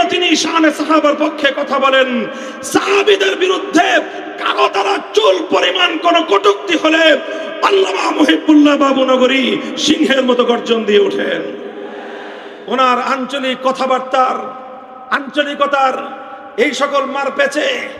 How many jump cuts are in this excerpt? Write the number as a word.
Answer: one